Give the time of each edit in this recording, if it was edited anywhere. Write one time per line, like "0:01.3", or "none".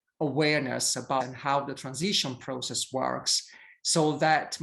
0:01.2